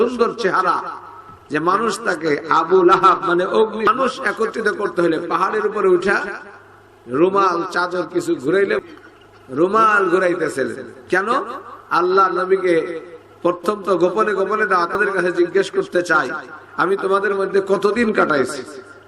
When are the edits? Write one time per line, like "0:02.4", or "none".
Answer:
0:03.9
0:08.8
0:15.0